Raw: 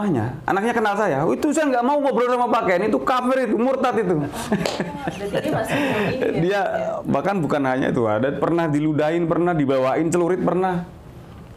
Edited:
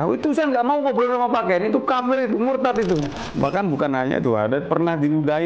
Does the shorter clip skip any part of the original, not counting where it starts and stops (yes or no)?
yes